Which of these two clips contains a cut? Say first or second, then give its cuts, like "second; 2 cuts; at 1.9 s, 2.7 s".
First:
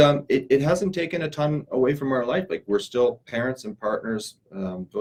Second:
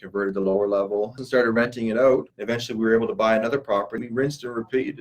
second; 3 cuts; at 1.2 s, 2.3 s, 3.9 s